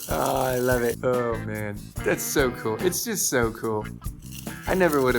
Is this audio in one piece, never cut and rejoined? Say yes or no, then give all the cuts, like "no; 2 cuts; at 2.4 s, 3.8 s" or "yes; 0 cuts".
no; 1 cut; at 1.0 s